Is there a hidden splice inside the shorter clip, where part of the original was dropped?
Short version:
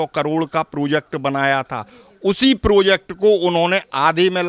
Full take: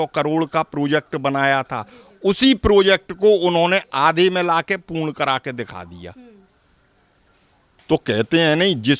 no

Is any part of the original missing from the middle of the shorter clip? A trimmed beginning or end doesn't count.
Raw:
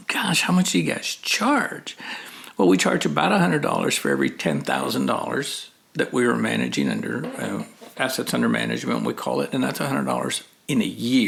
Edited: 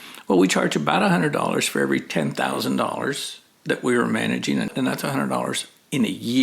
yes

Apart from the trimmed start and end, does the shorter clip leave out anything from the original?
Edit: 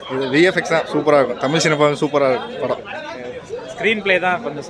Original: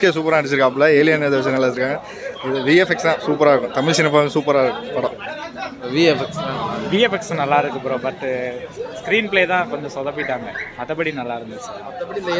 yes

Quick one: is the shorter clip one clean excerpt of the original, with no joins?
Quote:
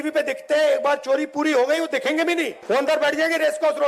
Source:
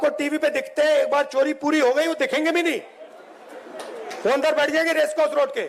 no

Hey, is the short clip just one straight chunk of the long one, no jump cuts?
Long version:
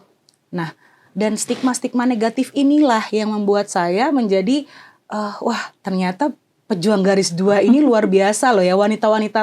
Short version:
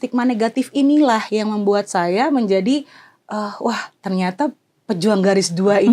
yes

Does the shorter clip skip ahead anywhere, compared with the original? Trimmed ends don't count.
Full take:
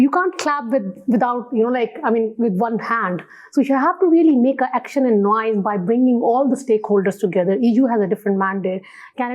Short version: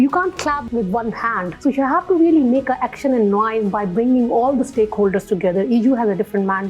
yes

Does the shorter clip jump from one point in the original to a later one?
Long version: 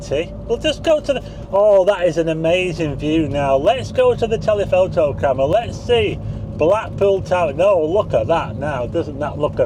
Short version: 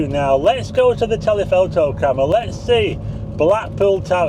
no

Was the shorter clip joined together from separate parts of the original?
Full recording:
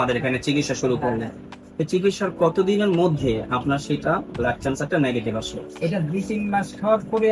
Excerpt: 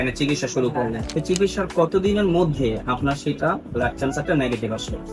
yes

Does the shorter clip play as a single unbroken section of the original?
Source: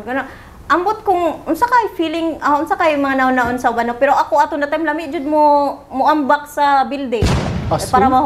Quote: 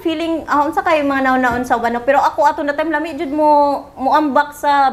yes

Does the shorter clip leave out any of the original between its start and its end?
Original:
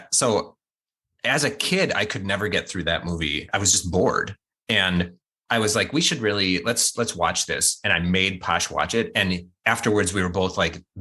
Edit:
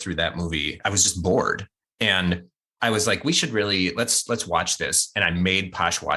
no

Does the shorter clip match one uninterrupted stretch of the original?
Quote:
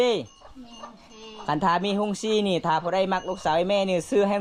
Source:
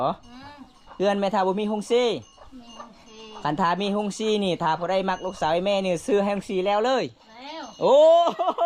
yes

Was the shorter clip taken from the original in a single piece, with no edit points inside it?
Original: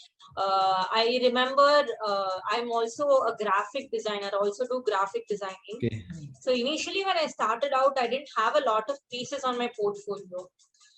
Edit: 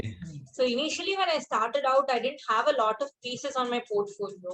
yes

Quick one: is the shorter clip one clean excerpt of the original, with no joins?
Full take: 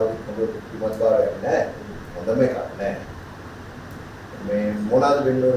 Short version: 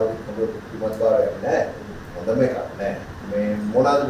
no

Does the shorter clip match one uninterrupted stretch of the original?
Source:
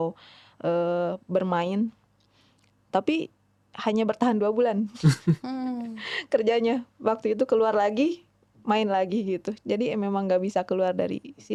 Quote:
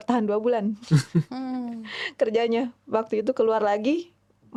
yes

